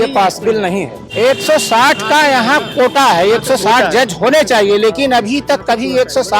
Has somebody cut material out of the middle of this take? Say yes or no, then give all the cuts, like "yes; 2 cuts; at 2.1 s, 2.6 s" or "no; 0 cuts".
yes; 1 cut; at 1.0 s